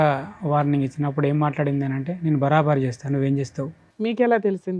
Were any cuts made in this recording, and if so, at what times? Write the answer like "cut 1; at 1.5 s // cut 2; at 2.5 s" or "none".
cut 1; at 3.8 s

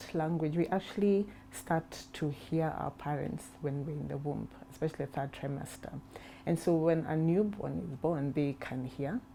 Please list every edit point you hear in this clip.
none

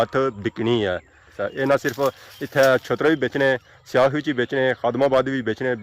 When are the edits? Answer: cut 1; at 1.3 s

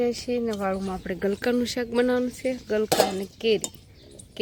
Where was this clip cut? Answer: none

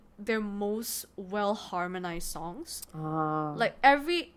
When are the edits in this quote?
none

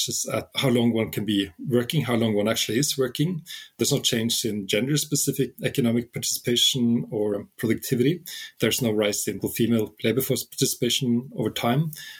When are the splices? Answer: cut 1; at 7.3 s // cut 2; at 9.4 s

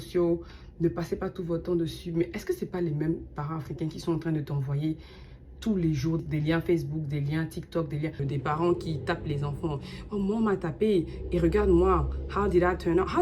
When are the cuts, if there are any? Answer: cut 1; at 6.2 s // cut 2; at 8.3 s

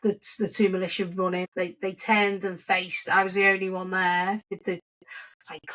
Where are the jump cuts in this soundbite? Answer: cut 1; at 1.5 s // cut 2; at 4.5 s

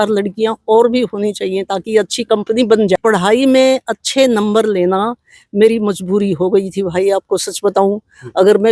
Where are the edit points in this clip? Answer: cut 1; at 3.0 s

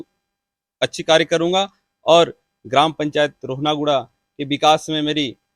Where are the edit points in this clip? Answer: none

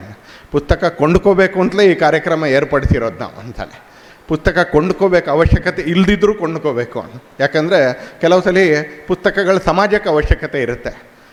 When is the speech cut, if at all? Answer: none

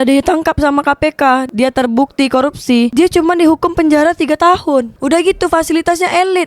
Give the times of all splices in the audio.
cut 1; at 1.5 s // cut 2; at 2.9 s // cut 3; at 4.9 s

